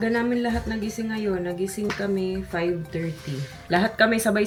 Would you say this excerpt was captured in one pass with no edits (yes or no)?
yes